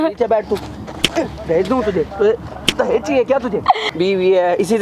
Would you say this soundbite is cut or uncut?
cut